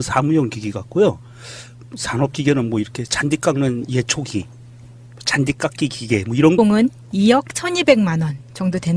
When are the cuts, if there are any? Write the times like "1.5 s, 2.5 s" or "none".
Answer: none